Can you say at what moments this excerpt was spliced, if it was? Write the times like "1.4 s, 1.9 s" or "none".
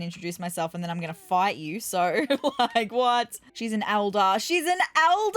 3.4 s

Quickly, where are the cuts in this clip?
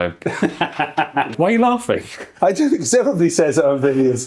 1.3 s

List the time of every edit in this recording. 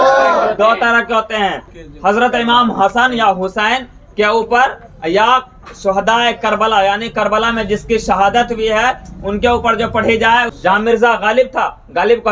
1.7 s, 10.5 s

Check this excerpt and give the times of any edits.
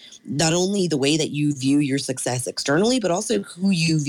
none

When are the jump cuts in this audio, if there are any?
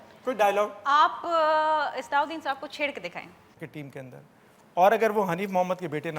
3.6 s

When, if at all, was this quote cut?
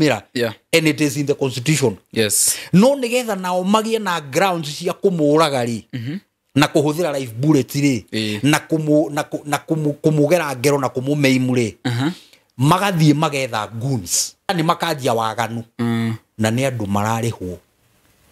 14.5 s

